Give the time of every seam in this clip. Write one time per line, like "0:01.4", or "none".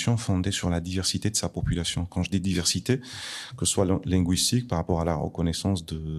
none